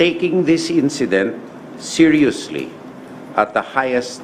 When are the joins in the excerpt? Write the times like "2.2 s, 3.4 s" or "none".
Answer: none